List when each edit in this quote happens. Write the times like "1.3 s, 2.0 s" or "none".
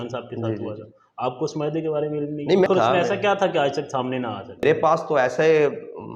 2.7 s, 4.6 s